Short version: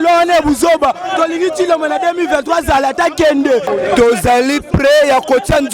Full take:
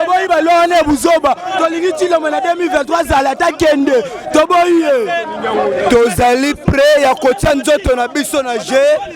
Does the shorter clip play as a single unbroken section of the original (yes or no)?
no